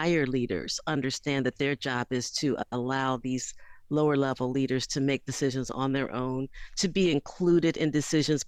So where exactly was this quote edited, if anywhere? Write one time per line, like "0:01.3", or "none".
none